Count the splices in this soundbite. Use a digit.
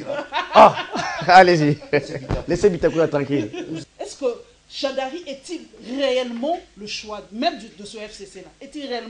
1